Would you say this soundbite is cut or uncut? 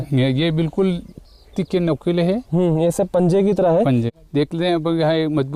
uncut